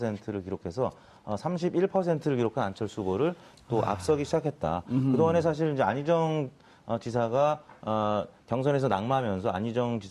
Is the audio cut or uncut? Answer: uncut